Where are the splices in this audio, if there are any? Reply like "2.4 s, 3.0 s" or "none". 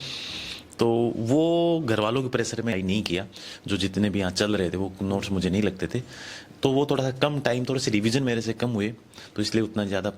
2.7 s